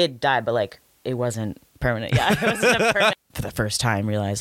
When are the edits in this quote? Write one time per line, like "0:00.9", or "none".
0:01.7
0:03.2